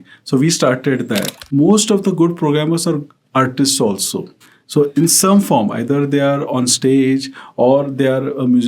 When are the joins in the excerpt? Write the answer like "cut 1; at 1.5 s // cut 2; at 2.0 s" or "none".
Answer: cut 1; at 1.4 s